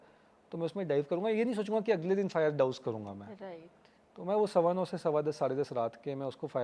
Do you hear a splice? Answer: no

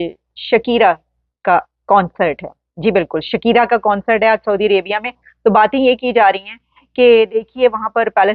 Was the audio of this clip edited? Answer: no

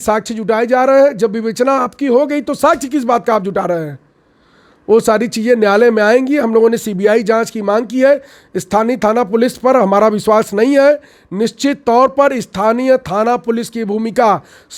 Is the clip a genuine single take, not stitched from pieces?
yes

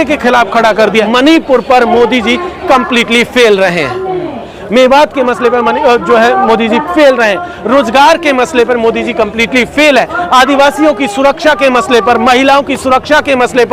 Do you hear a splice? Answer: yes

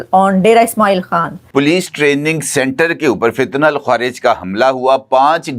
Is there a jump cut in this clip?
yes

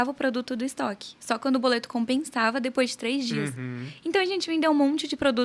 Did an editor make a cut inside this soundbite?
no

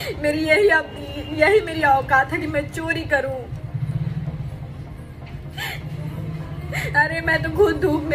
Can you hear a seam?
no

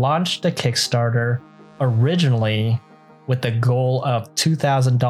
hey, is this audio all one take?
yes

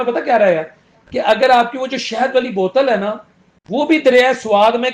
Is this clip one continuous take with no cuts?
yes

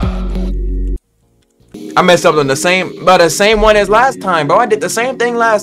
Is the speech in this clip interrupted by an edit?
yes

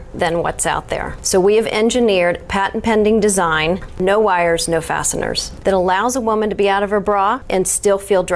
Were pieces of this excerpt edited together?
yes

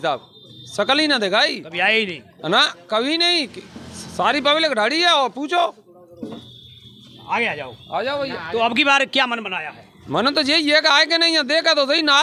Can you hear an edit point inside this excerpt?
no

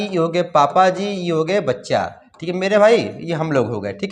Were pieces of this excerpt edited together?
no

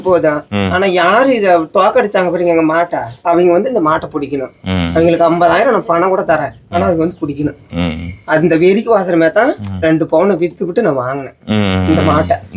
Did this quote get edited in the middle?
no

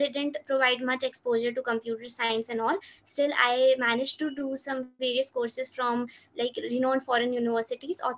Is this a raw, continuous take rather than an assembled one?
yes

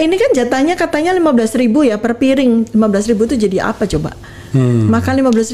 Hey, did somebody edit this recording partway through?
no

